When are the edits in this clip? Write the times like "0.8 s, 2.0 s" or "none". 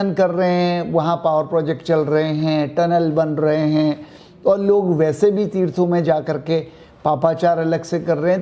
none